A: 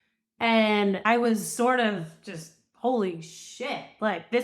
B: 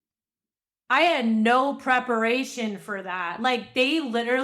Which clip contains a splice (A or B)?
A